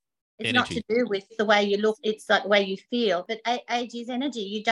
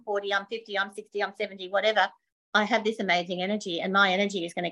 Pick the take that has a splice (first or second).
first